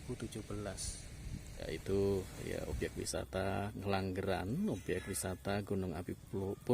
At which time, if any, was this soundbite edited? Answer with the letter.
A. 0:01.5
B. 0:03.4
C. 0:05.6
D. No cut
A